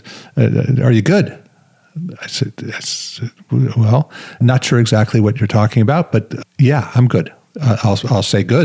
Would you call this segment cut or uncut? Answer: cut